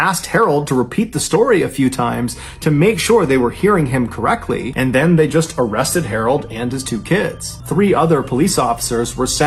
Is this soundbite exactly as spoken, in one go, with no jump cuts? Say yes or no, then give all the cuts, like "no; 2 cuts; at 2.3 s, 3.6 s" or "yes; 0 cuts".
yes; 0 cuts